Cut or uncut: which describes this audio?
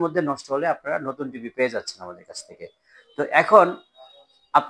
uncut